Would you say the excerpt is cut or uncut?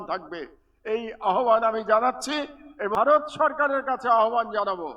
cut